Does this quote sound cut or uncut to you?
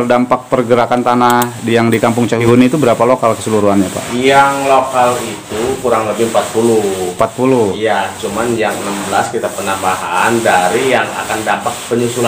cut